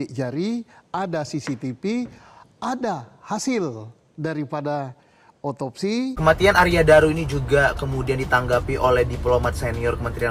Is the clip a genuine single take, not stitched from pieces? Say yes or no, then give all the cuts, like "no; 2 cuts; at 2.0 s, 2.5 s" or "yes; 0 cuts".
no; 1 cut; at 6.2 s